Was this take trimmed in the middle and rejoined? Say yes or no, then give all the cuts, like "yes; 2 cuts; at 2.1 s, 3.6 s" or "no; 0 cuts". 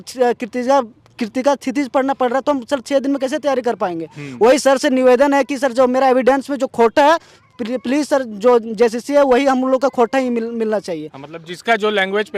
no; 0 cuts